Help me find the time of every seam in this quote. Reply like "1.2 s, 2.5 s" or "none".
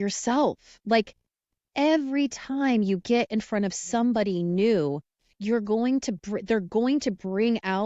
none